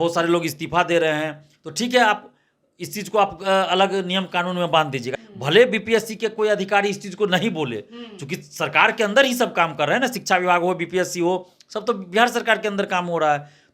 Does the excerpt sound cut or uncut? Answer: cut